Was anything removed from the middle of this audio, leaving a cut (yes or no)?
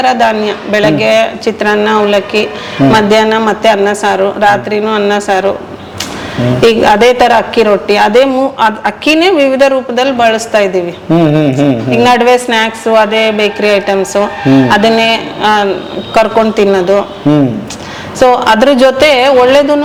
no